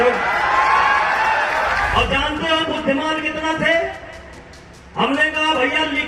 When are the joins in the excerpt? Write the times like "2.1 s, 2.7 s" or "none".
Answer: 1.9 s